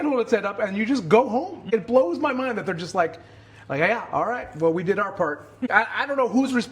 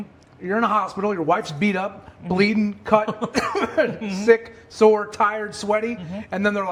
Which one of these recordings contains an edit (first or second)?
first